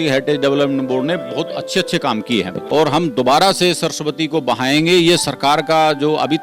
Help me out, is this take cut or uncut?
cut